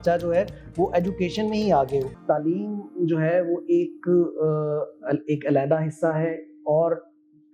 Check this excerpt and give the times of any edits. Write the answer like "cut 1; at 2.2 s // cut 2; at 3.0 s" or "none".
cut 1; at 2.2 s